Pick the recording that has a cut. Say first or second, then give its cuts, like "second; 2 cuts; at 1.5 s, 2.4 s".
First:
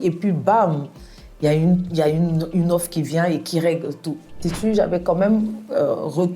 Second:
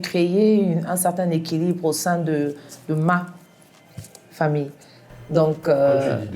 first; 1 cut; at 4.4 s